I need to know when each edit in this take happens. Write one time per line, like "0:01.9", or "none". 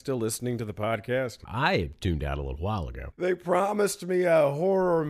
0:01.4
0:03.2